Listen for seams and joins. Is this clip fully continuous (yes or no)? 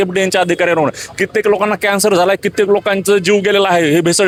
yes